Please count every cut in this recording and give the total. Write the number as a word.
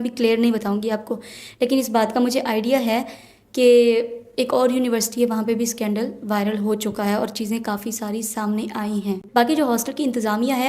one